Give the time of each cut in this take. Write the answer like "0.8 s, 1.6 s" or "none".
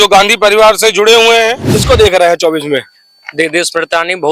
1.7 s

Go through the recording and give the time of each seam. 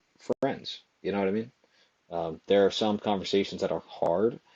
none

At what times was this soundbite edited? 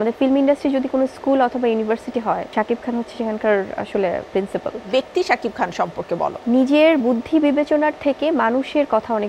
2.5 s, 4.9 s, 6.4 s

